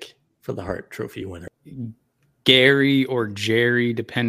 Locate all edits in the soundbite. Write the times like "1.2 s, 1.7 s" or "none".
1.4 s